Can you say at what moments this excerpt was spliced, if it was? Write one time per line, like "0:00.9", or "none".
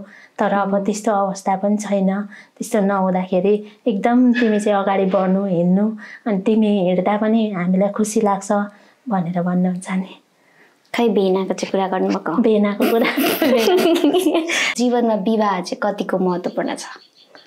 0:14.7